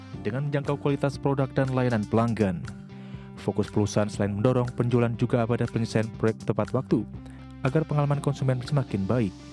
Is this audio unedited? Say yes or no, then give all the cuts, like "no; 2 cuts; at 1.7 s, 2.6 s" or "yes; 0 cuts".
yes; 0 cuts